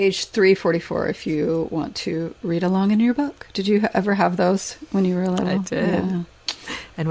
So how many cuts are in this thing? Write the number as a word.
zero